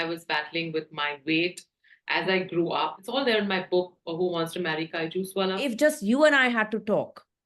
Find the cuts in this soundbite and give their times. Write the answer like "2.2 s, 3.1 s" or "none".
3.0 s, 5.6 s